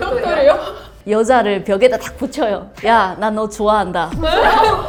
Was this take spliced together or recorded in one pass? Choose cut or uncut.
uncut